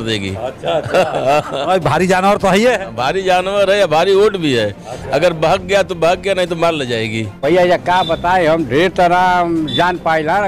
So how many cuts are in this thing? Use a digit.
1